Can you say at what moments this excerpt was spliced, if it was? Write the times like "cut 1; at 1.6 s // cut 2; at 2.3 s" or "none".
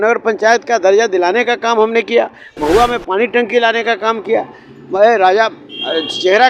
none